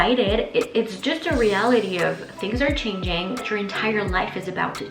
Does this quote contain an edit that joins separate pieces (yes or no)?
yes